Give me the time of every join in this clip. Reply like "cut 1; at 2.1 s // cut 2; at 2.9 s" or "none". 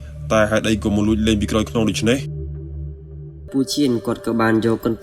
cut 1; at 3.5 s